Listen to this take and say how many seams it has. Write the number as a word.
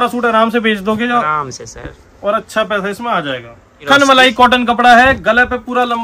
one